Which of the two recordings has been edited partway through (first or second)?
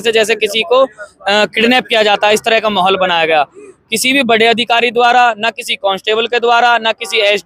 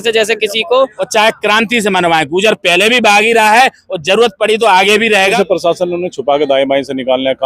second